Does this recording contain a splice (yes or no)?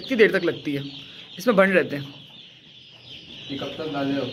no